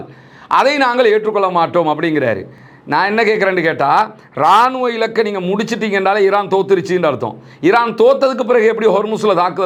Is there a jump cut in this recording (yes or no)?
no